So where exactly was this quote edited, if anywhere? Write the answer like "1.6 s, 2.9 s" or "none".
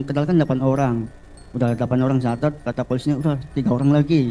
none